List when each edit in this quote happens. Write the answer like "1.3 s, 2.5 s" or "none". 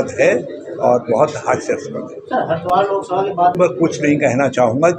none